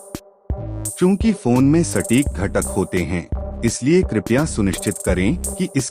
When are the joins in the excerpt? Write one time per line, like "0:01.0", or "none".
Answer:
0:00.9